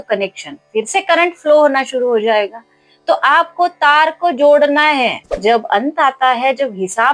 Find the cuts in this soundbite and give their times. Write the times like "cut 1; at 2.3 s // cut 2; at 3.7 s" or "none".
cut 1; at 5.4 s